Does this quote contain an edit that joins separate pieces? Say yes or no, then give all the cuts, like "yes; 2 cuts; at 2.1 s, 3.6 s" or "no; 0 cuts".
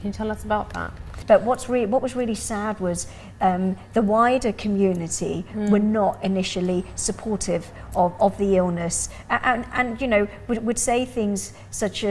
no; 0 cuts